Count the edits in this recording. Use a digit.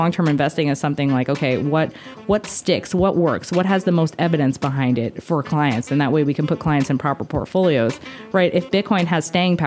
0